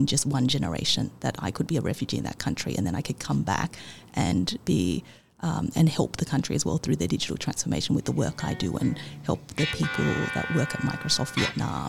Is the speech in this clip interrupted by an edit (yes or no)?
no